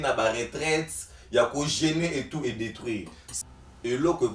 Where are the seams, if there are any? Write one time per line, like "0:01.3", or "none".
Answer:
0:03.3